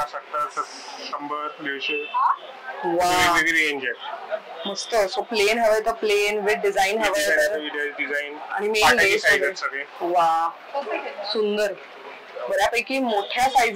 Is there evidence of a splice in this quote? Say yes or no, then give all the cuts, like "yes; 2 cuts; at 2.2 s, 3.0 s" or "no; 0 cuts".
no; 0 cuts